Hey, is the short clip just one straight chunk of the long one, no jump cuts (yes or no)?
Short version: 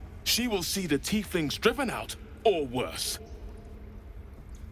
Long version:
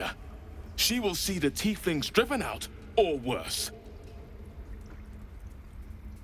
no